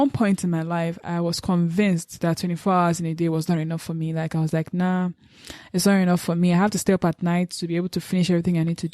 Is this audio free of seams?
yes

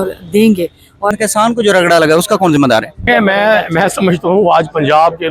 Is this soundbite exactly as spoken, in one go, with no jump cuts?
no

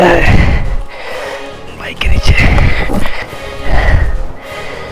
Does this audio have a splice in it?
yes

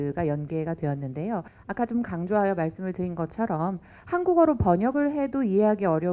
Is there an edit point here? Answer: yes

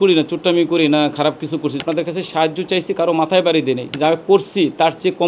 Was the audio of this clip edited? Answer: yes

